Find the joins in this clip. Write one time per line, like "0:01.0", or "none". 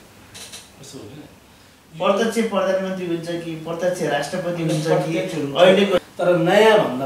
0:06.0

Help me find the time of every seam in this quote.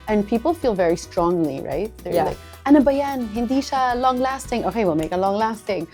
none

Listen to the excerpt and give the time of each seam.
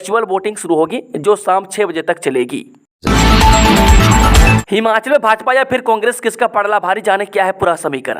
0:02.9
0:04.7

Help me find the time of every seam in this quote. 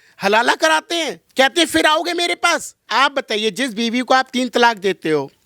0:02.8

